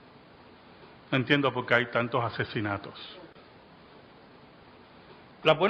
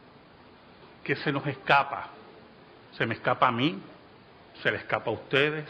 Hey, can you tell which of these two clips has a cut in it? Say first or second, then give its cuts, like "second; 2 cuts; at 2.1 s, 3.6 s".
second; 1 cut; at 1.0 s